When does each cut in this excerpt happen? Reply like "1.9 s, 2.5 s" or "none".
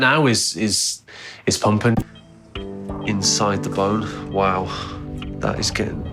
2.1 s